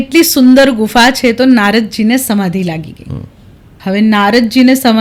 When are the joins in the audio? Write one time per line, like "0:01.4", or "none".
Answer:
none